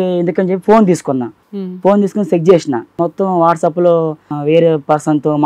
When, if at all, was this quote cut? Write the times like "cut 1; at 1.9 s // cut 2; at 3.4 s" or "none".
cut 1; at 1.4 s // cut 2; at 3.0 s // cut 3; at 4.3 s